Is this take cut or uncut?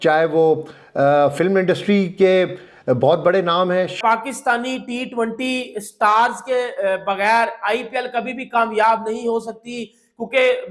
cut